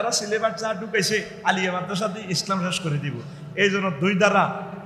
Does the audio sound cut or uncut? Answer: cut